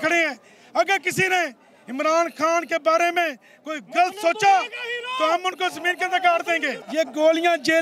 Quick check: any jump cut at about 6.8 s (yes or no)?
yes